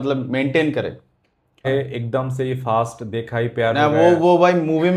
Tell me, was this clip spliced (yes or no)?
yes